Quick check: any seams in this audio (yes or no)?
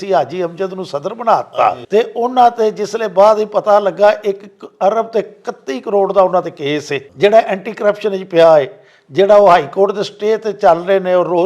yes